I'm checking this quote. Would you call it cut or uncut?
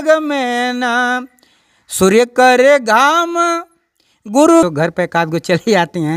cut